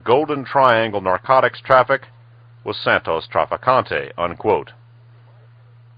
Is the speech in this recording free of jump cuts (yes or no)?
no